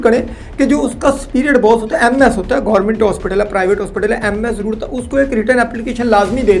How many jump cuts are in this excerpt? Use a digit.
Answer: 0